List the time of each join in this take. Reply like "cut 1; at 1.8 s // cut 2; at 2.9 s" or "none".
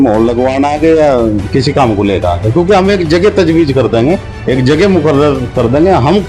none